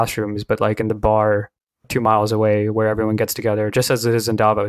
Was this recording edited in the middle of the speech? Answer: no; 0 cuts

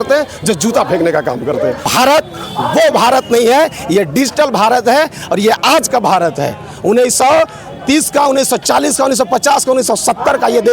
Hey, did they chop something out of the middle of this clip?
yes; 1 cut; at 1.9 s

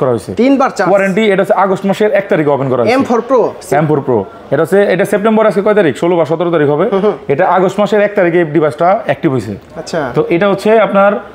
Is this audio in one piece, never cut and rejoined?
yes; 0 cuts

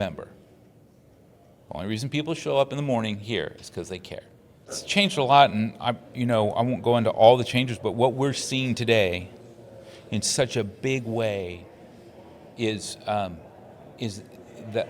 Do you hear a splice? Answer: yes; 1 cut; at 4.8 s

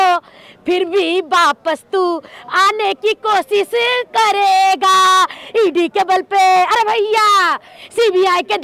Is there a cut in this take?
no; 0 cuts

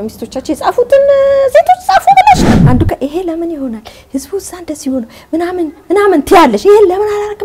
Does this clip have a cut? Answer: yes; 1 cut; at 2.4 s

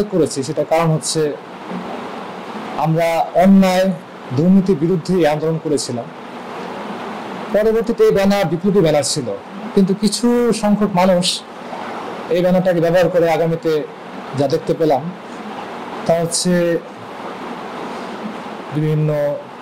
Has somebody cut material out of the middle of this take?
no; 0 cuts

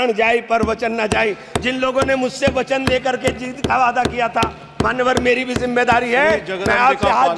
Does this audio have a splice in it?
no; 0 cuts

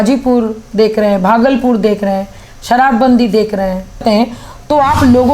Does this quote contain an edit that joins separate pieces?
yes; 1 cut; at 4.0 s

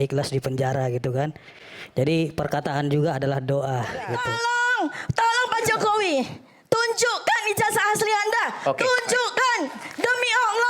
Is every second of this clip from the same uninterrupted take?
no; 1 cut; at 4.2 s

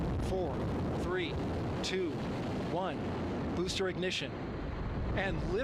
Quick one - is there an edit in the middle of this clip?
no; 0 cuts

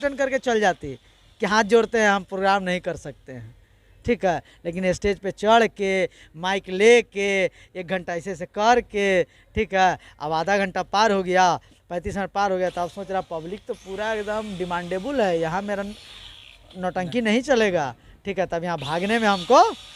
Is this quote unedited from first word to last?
yes; 0 cuts

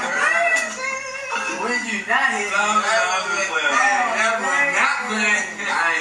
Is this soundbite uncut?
yes; 0 cuts

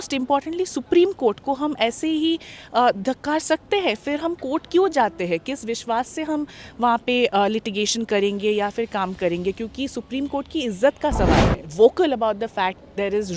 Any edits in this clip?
yes; 1 cut; at 11.6 s

